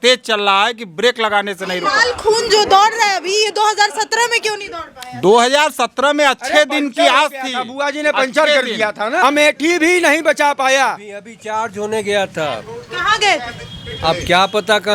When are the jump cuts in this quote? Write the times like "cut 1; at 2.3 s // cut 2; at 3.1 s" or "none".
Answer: cut 1; at 9.2 s